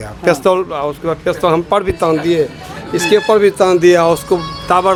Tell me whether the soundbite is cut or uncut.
uncut